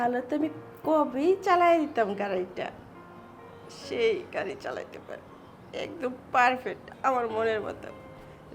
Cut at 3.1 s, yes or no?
no